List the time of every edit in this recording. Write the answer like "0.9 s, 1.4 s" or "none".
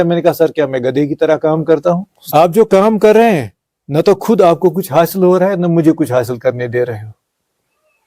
2.1 s